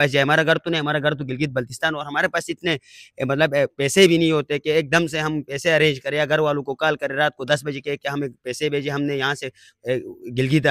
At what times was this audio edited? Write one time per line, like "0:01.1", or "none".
none